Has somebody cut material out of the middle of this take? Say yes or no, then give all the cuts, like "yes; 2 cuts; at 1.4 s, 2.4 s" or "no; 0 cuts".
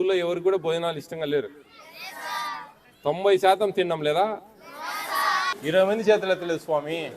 yes; 1 cut; at 5.5 s